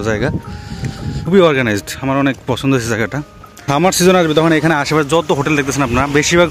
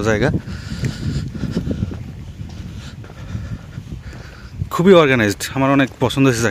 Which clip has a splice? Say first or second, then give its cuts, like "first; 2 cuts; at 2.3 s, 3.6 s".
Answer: first; 2 cuts; at 1.3 s, 3.7 s